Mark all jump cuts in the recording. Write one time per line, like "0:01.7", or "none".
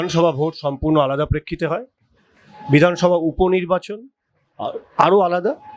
none